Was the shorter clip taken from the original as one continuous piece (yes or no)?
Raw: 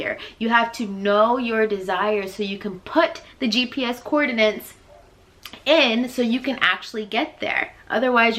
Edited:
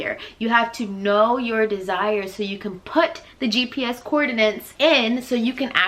no